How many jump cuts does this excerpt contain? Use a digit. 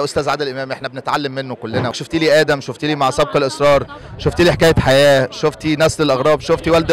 1